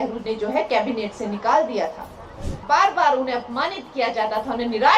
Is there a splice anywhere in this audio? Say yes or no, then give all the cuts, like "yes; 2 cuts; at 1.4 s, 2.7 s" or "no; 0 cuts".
yes; 1 cut; at 2.6 s